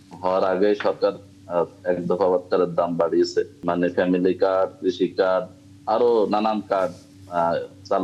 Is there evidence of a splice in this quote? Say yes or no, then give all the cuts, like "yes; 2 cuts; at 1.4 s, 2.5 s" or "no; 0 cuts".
yes; 1 cut; at 3.6 s